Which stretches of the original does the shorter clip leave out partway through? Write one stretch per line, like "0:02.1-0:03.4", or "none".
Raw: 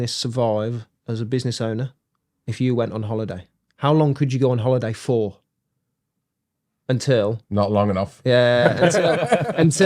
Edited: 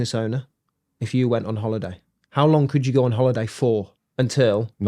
0:05.4-0:06.7